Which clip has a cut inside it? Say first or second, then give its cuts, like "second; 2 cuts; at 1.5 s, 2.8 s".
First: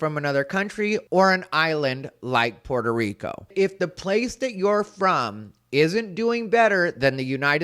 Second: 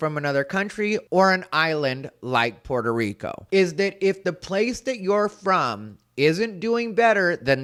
first; 1 cut; at 3.5 s